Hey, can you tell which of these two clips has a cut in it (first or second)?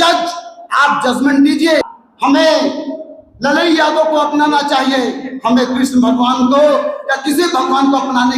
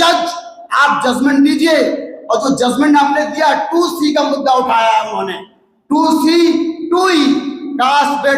first